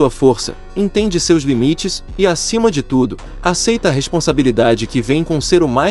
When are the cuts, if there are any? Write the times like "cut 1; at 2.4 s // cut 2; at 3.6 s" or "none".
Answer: none